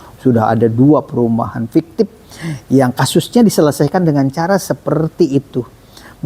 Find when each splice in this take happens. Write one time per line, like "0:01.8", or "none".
none